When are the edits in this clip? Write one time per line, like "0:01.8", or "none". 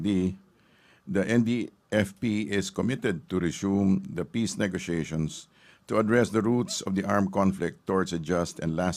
none

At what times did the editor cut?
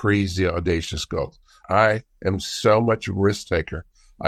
none

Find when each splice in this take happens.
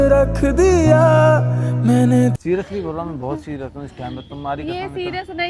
0:02.4

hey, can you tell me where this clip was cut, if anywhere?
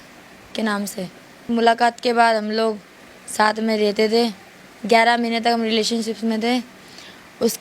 0:01.4

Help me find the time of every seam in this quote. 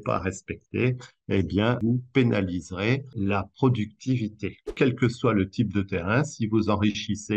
0:01.8
0:03.1
0:04.7

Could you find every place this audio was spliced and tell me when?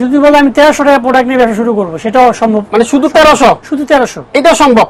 none

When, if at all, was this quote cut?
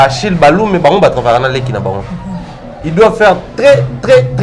none

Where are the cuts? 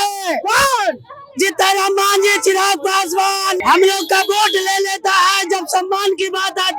0:03.6

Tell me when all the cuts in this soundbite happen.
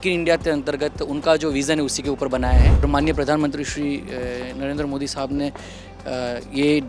0:02.8

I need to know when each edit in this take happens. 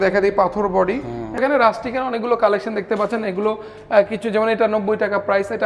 0:01.4

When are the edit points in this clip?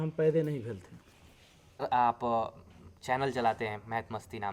0:01.8

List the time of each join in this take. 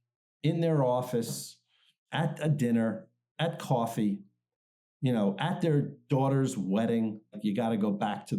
0:07.4

